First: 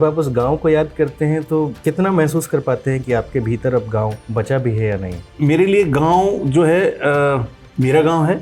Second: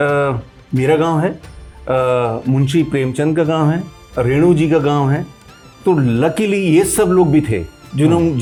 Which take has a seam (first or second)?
first